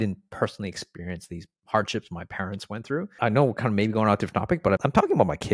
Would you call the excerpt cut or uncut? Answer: cut